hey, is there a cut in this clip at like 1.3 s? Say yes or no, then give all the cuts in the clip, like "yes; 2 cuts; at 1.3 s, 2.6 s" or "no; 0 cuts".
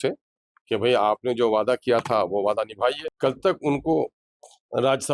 no; 1 cut; at 3.1 s